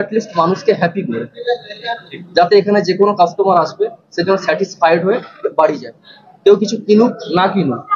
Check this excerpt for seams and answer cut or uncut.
uncut